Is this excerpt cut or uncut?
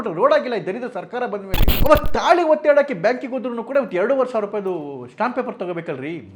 cut